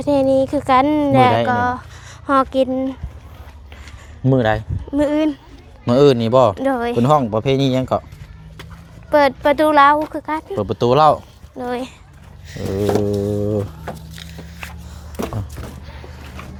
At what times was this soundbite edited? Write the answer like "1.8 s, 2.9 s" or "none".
none